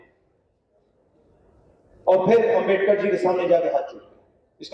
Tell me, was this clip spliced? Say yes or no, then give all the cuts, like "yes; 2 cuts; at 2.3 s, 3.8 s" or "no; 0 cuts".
no; 0 cuts